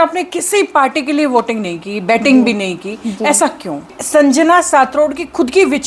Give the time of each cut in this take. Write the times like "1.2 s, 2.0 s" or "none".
4.0 s